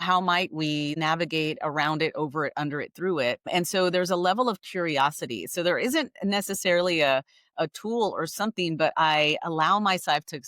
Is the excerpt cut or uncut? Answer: cut